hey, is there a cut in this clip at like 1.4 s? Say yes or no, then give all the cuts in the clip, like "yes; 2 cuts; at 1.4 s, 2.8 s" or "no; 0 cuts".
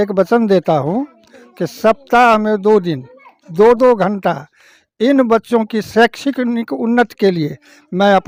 no; 0 cuts